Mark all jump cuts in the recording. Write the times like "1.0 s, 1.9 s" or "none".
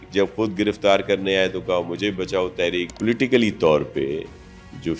2.9 s